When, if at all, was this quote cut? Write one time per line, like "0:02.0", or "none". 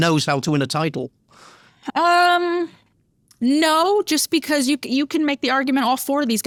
none